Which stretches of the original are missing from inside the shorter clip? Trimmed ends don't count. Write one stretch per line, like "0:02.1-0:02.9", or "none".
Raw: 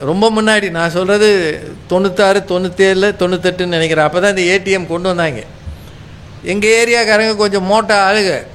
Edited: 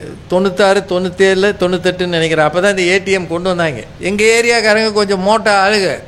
0:05.5-0:06.3